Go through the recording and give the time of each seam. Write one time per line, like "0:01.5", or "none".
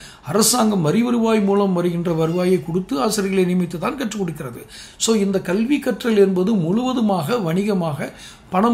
none